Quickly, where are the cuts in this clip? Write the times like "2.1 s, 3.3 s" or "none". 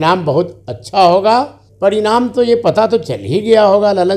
1.6 s